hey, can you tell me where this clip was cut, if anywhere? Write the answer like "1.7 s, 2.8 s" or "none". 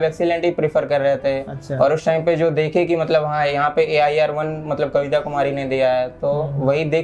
none